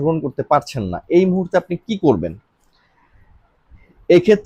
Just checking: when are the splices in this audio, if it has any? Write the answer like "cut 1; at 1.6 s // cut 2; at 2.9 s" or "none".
none